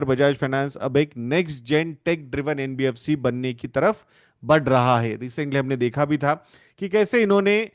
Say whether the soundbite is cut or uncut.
uncut